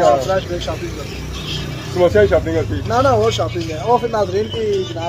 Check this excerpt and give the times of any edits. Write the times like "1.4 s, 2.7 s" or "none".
none